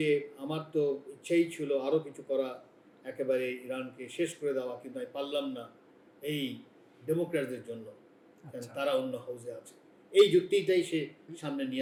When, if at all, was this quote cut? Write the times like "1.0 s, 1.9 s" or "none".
none